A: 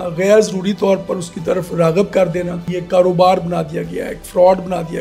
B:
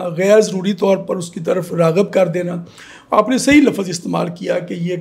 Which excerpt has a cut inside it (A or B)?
A